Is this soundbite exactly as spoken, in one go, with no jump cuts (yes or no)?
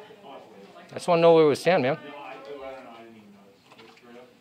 yes